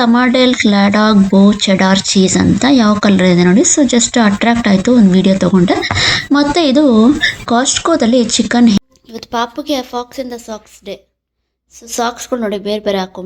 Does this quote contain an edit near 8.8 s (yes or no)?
yes